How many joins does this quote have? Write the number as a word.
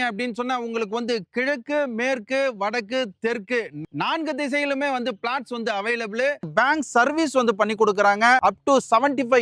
one